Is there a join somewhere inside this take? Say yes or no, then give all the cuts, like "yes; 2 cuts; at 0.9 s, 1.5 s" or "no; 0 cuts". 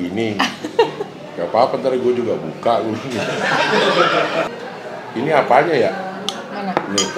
yes; 1 cut; at 4.5 s